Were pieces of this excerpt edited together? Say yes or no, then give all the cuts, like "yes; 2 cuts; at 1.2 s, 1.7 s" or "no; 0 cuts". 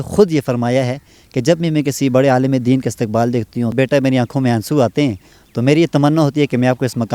yes; 1 cut; at 3.7 s